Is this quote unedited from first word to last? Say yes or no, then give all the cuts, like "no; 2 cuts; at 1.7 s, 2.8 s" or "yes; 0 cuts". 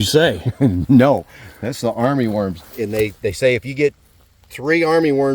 no; 1 cut; at 2.6 s